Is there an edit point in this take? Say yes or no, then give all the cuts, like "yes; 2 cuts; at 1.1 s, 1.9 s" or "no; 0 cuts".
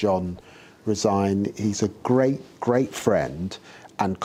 no; 0 cuts